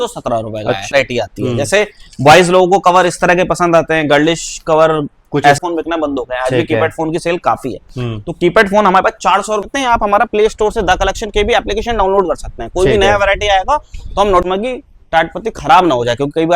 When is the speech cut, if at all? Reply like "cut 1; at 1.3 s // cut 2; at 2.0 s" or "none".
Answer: cut 1; at 0.9 s // cut 2; at 5.6 s // cut 3; at 9.7 s // cut 4; at 14.4 s

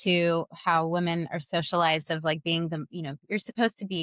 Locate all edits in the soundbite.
none

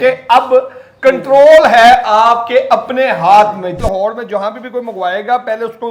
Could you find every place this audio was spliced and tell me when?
cut 1; at 3.8 s

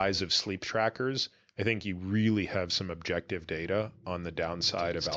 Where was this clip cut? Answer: none

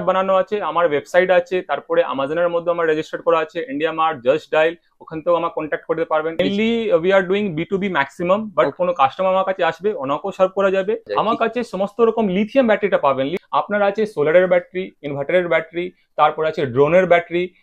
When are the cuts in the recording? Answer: cut 1; at 6.4 s // cut 2; at 11.1 s // cut 3; at 13.3 s

